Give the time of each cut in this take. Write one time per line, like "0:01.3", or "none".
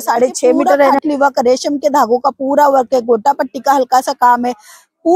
0:00.9

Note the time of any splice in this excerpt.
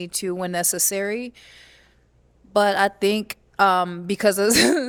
none

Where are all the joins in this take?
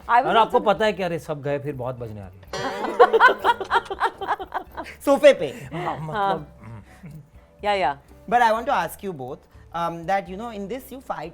none

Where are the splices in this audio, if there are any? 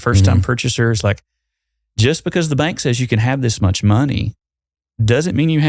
none

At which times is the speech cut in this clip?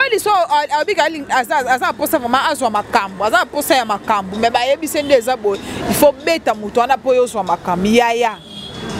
none

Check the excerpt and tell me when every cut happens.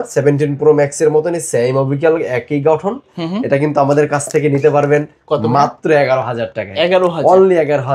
none

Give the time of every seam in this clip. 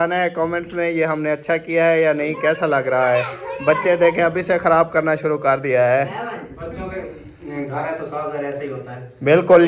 none

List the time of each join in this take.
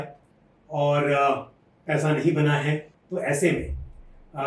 0:03.0

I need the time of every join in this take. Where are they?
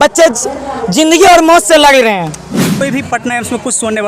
0:02.8

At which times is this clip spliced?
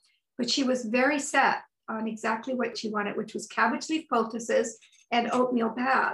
0:02.8

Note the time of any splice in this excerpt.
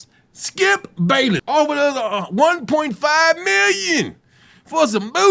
0:01.4

